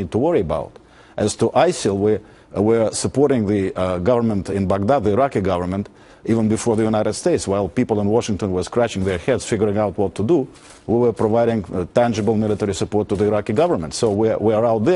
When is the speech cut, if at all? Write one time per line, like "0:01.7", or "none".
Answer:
none